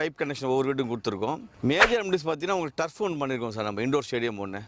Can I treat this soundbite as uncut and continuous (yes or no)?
yes